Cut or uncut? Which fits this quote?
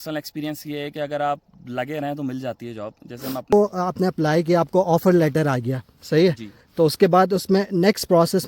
cut